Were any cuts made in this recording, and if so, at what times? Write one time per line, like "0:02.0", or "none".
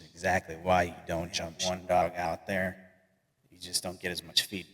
0:01.6